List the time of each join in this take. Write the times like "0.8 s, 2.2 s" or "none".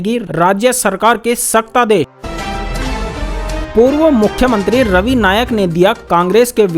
2.2 s